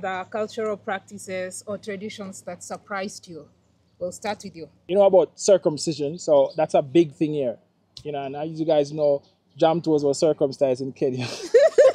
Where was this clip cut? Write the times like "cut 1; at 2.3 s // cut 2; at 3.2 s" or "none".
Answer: cut 1; at 4.7 s